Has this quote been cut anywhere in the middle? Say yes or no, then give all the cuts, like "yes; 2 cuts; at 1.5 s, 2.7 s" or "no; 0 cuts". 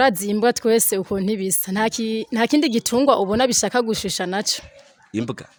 no; 0 cuts